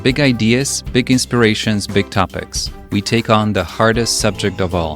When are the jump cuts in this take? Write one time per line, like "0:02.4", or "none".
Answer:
none